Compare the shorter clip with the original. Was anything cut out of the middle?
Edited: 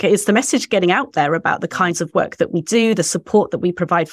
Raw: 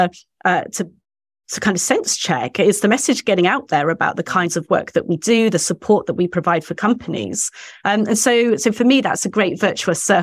no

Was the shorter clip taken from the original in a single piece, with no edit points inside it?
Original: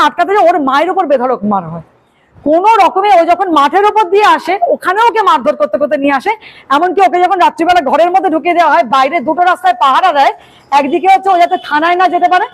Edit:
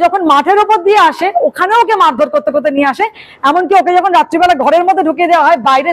yes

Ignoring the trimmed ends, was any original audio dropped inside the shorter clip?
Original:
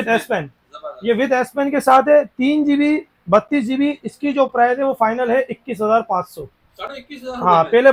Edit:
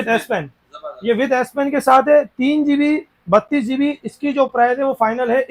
no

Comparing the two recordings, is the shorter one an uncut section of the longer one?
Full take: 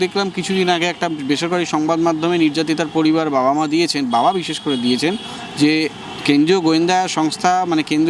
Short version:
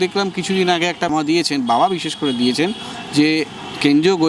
no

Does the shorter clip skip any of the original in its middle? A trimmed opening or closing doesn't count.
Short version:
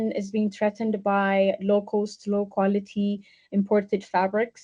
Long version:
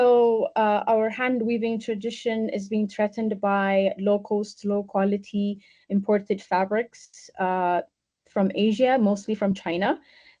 no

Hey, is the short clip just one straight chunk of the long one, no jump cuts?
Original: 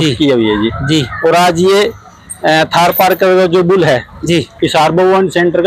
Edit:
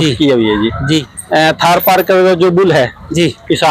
no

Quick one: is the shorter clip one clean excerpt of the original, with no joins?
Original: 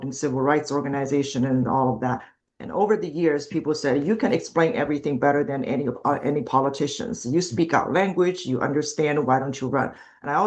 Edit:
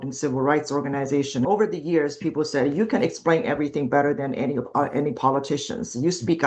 no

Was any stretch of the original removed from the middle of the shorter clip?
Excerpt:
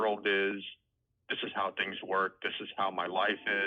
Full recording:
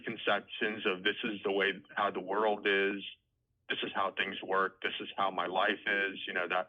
no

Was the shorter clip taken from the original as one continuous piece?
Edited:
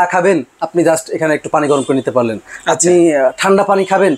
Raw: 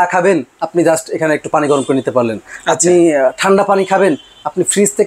yes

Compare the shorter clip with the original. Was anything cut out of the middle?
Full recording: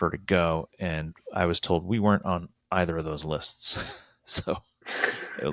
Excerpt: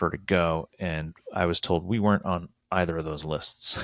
no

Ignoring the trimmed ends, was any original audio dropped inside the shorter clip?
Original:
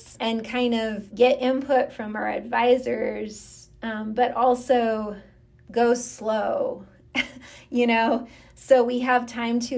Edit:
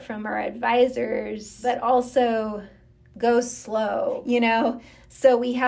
yes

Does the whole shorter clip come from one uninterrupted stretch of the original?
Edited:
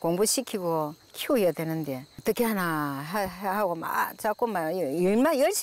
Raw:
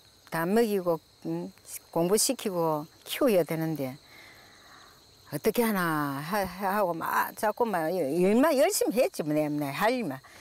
no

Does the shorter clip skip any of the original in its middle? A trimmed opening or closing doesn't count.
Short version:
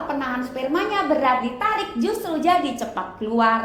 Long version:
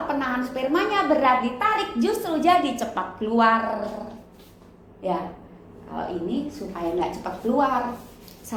no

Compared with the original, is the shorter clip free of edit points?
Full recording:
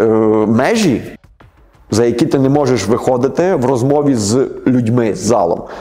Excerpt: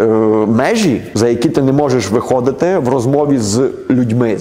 no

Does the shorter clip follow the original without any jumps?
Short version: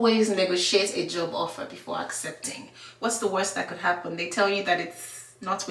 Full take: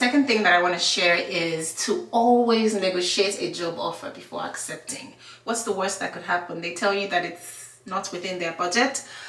yes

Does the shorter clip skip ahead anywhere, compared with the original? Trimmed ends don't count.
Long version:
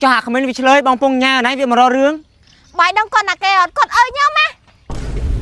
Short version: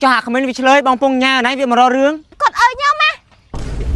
yes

